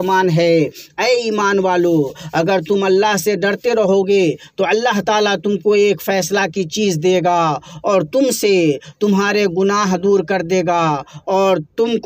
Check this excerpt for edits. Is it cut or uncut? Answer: uncut